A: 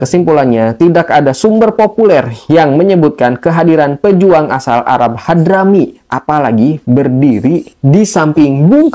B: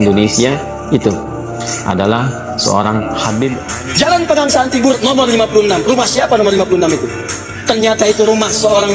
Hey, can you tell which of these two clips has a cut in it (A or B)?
B